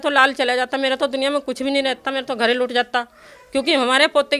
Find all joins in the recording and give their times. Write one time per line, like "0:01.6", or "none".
none